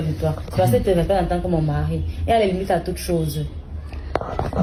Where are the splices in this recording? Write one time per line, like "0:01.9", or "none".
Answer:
none